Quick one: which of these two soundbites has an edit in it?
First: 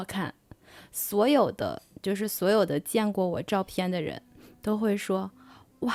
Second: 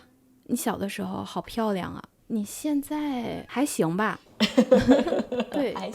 second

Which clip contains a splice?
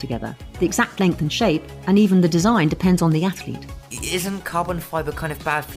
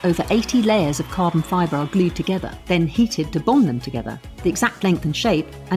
second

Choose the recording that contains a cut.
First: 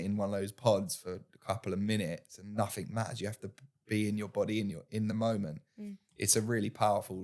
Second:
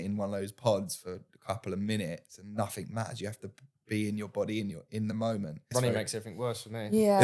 second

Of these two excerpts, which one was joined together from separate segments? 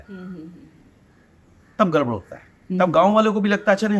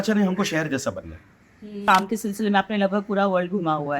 second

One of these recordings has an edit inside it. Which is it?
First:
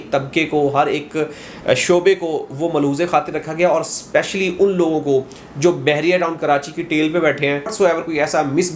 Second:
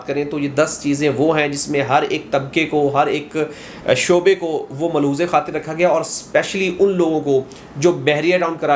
first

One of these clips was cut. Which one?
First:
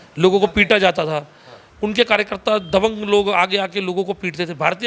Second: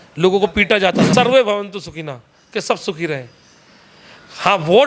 second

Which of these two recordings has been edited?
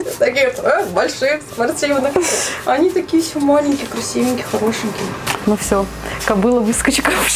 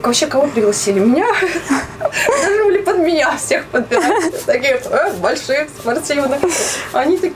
first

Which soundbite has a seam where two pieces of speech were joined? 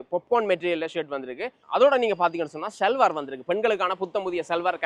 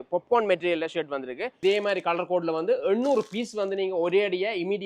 second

